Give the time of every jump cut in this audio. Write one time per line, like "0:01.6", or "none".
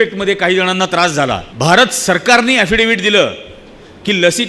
0:01.5